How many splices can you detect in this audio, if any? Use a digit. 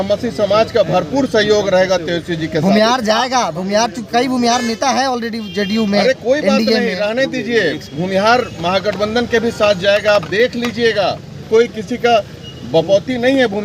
1